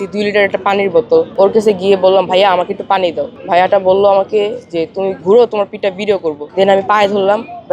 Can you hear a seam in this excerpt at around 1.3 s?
yes; 3 cuts; at 1.3 s, 3.3 s, 6.4 s

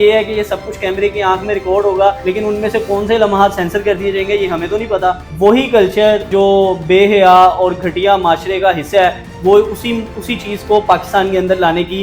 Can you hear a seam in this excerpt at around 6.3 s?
yes; 3 cuts; at 2.2 s, 5.3 s, 6.3 s

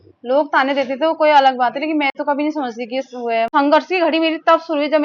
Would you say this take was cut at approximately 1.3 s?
no; 1 cut; at 3.5 s

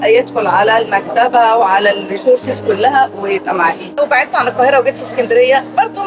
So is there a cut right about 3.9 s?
yes; 1 cut; at 3.9 s

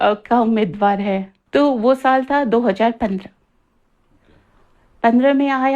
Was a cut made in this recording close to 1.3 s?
yes; 1 cut; at 1.3 s

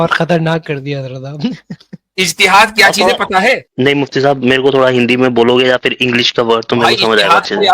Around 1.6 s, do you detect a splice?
no; 1 cut; at 3.7 s

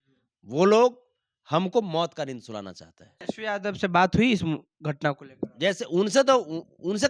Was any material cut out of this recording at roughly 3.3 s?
yes; 1 cut; at 3.3 s

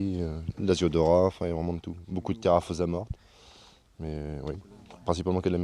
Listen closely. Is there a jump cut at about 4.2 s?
yes; 1 cut; at 4.2 s

